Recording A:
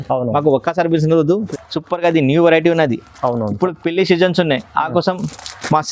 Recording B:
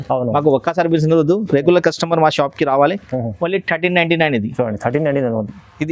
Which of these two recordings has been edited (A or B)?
A